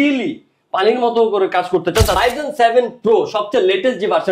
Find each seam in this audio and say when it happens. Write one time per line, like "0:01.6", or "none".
0:02.2